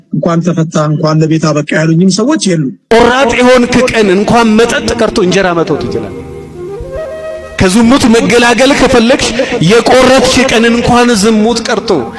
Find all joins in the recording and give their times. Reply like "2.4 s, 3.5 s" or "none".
2.8 s